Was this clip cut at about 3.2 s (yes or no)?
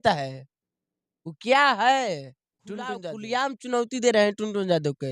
yes